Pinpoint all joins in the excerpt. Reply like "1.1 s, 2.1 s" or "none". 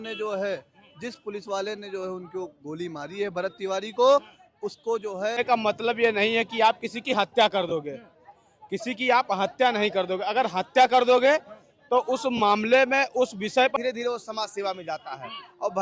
5.4 s, 13.7 s